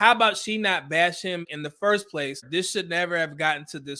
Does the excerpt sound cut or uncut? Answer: cut